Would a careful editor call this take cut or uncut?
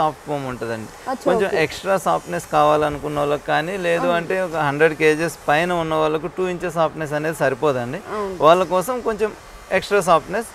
uncut